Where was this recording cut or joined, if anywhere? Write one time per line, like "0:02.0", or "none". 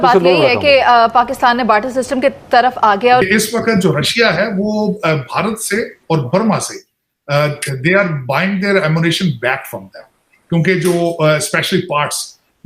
0:03.2